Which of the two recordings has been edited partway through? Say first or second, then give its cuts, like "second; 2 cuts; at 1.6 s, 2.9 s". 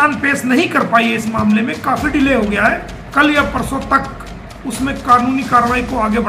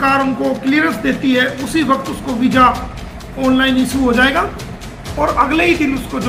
first; 1 cut; at 3.0 s